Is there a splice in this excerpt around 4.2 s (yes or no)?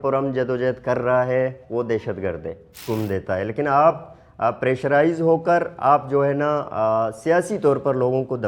no